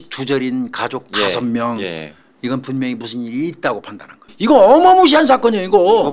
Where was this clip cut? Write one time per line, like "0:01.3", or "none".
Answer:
0:04.3